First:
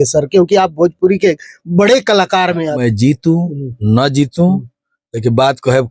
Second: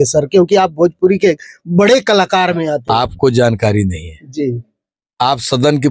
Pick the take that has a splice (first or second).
first